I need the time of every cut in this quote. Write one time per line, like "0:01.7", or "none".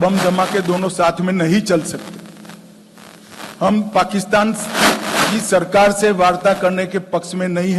none

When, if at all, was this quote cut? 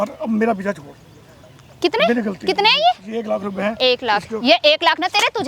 none

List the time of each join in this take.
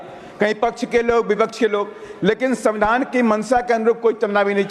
none

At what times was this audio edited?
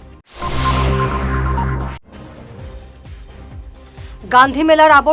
0:03.9

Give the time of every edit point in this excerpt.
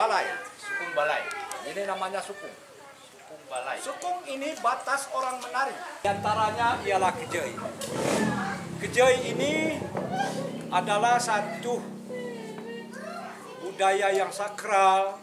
0:06.1

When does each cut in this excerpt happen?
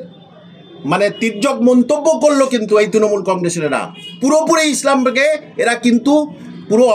none

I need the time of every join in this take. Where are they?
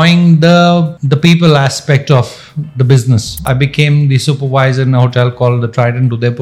0:01.0
0:03.4

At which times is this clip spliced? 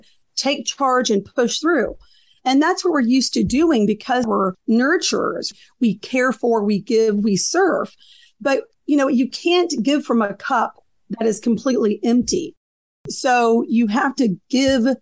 0:04.2
0:05.5
0:13.0

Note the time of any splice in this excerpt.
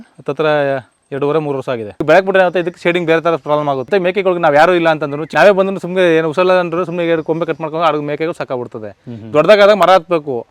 0:01.9
0:03.9
0:05.2

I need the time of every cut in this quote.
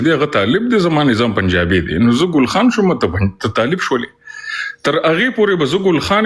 none

